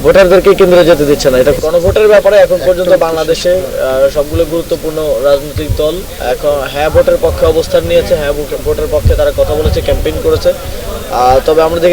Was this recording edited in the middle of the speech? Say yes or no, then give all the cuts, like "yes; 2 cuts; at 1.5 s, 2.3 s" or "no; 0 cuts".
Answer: yes; 1 cut; at 1.6 s